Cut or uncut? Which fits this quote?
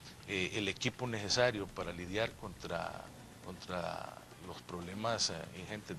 uncut